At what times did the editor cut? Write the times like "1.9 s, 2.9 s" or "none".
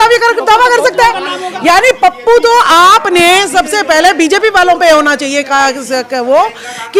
none